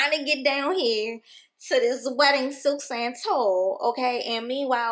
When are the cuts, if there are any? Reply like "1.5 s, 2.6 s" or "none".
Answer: none